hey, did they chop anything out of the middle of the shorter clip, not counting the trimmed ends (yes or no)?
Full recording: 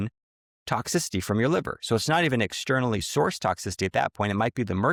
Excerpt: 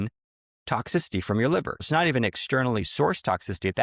yes